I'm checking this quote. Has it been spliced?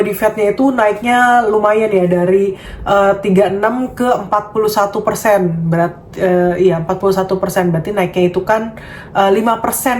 no; 0 cuts

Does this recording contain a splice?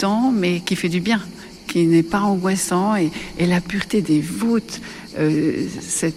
no; 0 cuts

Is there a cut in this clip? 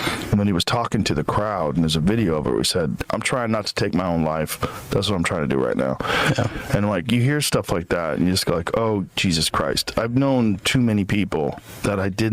yes; 1 cut; at 3.0 s

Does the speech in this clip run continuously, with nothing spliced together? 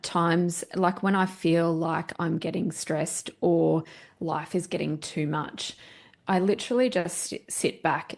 yes; 0 cuts

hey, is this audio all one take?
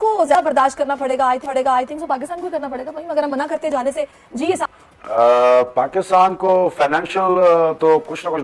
yes; 0 cuts

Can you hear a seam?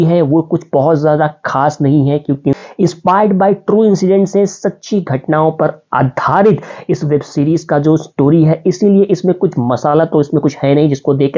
no; 0 cuts

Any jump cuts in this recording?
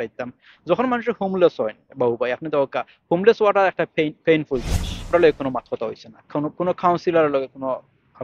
yes; 1 cut; at 5.1 s

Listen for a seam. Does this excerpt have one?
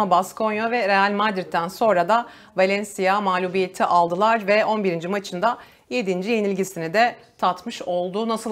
no; 0 cuts

